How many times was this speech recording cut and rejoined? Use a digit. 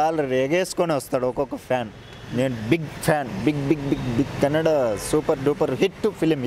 0